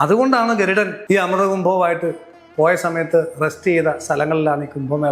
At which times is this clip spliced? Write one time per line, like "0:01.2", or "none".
0:01.0